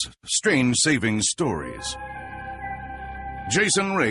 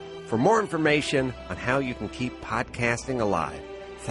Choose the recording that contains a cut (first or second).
second